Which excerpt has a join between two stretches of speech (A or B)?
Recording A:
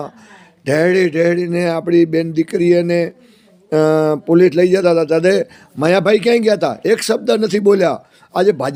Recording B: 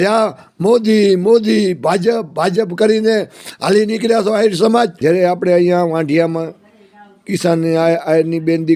B